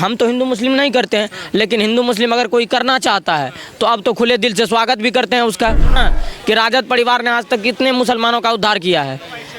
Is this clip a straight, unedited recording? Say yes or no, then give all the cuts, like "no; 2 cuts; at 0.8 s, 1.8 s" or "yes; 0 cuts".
no; 1 cut; at 6.0 s